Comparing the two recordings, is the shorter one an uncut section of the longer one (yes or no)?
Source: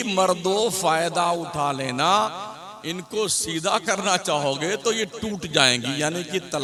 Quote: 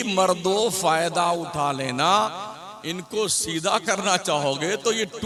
yes